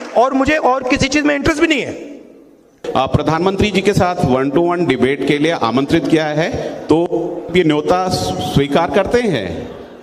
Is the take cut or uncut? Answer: cut